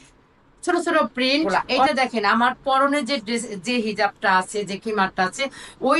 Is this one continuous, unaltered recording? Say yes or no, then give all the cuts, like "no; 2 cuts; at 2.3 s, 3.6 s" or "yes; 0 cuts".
no; 1 cut; at 1.9 s